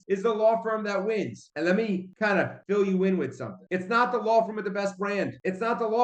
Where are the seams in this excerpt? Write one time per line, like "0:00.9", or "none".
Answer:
none